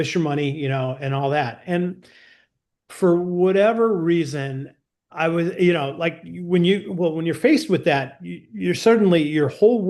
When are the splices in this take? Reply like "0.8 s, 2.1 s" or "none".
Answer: none